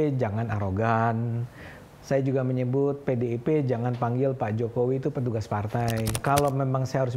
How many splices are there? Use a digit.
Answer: 1